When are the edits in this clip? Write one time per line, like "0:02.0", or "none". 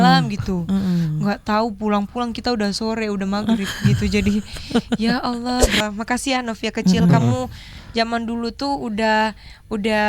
0:05.8